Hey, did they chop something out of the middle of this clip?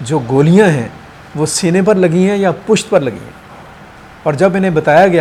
no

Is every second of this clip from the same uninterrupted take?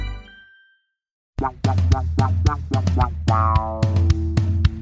no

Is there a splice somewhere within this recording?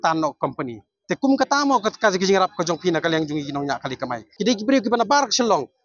yes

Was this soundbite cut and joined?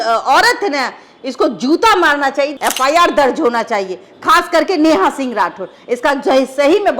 yes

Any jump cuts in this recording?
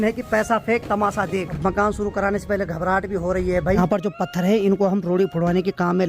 yes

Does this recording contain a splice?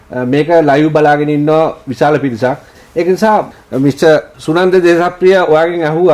yes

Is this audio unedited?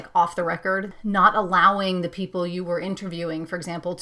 no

